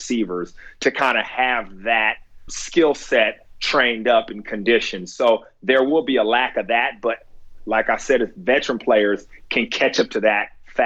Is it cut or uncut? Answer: cut